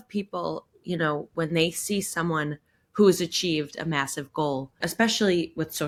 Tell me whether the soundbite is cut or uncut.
uncut